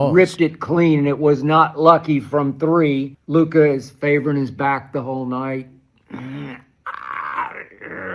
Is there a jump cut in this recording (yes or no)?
yes